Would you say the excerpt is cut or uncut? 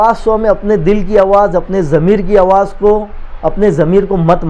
uncut